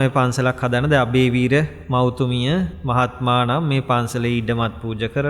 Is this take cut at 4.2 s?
no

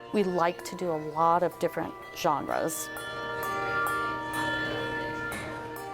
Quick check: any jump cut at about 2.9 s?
yes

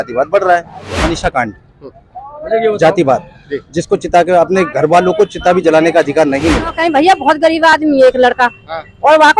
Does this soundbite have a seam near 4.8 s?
no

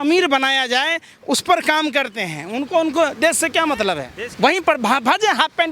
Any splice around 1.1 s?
no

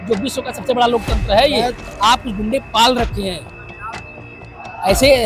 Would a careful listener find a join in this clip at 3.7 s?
no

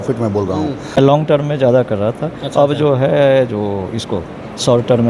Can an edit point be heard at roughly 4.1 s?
no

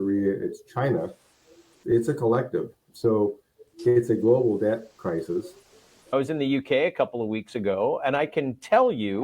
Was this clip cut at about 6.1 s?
yes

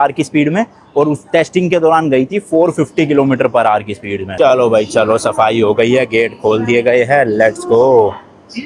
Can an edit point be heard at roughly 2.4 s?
no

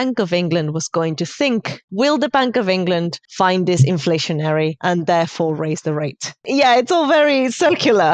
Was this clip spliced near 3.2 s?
yes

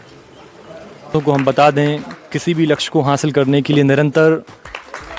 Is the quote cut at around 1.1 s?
yes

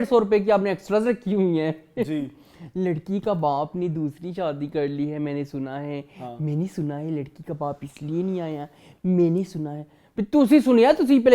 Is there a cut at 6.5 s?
no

